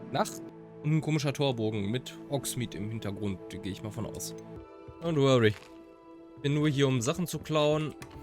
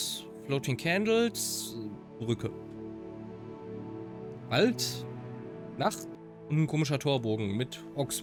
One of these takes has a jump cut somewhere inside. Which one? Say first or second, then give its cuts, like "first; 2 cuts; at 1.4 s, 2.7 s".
first; 1 cut; at 4.6 s